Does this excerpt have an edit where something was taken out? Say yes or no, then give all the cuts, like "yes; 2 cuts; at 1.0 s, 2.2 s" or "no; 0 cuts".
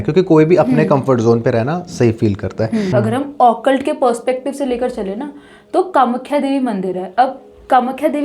yes; 1 cut; at 2.9 s